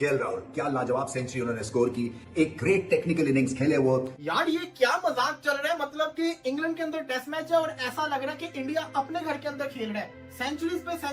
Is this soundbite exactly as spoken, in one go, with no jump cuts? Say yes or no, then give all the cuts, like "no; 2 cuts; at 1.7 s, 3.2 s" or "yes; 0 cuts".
no; 1 cut; at 4.1 s